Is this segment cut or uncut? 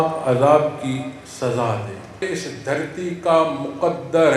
cut